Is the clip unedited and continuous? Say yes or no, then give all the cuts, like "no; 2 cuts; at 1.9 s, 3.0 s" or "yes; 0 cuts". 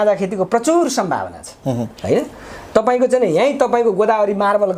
yes; 0 cuts